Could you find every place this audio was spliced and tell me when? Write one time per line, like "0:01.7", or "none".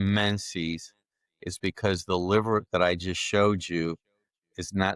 none

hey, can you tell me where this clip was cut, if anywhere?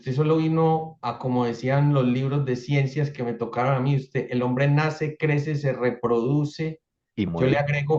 none

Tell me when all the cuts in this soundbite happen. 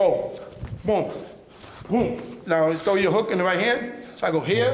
0:02.3

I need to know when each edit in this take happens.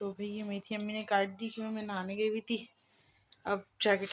none

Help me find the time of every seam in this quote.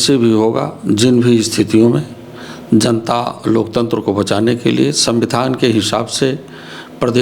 none

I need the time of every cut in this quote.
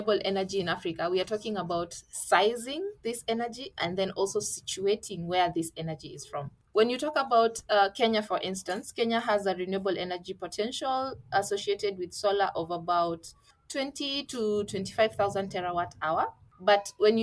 none

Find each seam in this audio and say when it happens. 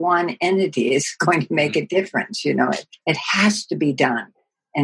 0:02.9

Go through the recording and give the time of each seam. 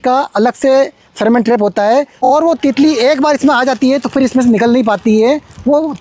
0:02.1

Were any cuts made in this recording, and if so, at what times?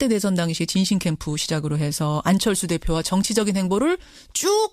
0:02.6

